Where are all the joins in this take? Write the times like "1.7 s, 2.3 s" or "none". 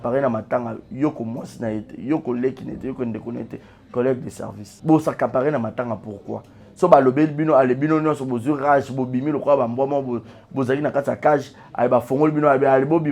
4.7 s